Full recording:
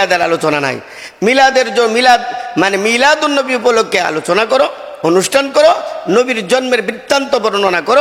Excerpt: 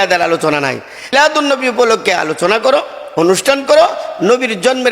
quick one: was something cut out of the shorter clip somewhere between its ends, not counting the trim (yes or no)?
yes